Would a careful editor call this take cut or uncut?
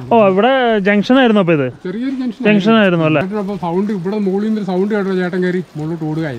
cut